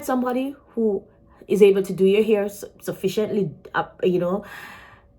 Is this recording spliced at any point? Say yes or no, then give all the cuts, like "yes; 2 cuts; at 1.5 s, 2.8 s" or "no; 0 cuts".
no; 0 cuts